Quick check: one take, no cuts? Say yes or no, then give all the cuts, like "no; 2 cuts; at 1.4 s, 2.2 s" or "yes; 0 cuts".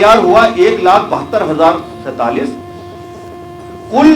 yes; 0 cuts